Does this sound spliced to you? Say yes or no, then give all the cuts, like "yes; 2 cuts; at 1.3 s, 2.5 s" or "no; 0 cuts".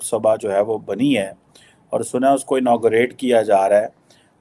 no; 0 cuts